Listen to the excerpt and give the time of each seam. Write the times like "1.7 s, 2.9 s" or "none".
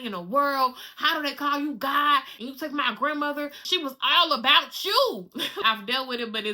2.4 s, 3.6 s, 5.6 s